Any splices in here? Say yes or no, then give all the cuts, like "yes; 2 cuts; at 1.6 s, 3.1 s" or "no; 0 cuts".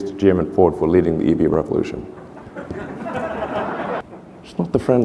yes; 2 cuts; at 1.5 s, 4.1 s